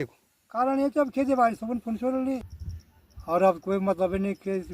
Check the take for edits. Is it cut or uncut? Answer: cut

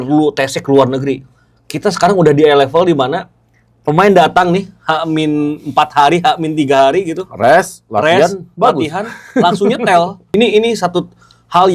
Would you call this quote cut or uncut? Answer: cut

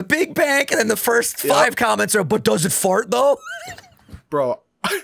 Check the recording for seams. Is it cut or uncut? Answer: uncut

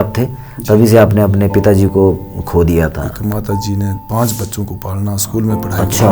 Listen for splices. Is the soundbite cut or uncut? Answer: cut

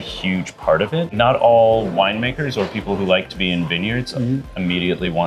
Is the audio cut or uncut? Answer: cut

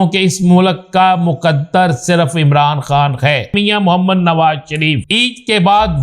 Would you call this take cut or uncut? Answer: cut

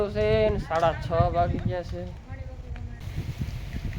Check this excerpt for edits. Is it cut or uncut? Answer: cut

